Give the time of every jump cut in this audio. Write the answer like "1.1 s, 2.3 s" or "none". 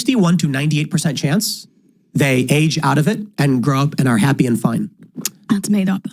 none